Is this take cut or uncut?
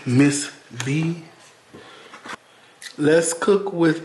cut